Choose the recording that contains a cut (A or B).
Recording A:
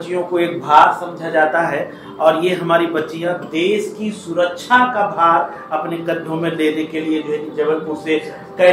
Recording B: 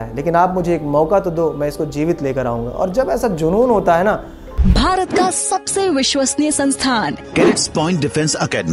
B